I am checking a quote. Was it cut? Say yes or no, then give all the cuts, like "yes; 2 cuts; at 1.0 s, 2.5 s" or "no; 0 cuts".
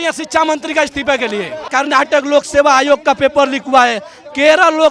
yes; 1 cut; at 1.6 s